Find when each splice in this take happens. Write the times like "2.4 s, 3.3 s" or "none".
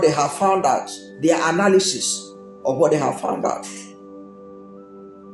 none